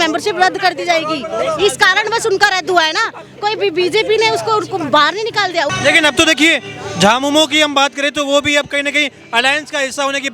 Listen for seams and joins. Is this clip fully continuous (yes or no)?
yes